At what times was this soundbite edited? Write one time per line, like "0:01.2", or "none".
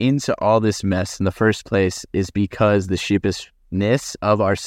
none